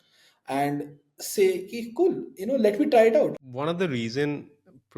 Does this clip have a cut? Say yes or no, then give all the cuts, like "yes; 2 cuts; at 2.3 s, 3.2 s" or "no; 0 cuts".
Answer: yes; 1 cut; at 3.3 s